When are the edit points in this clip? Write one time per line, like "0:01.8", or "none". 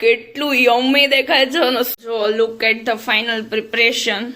0:02.0

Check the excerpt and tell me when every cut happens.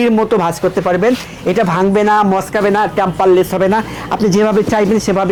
none

